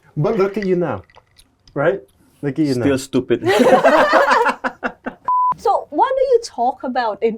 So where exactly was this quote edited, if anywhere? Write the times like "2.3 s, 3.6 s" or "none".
5.3 s